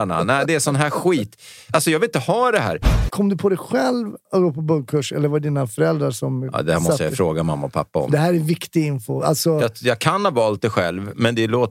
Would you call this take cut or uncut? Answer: cut